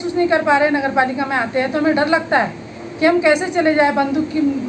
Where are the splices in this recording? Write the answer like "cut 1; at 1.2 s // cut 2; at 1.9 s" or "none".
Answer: none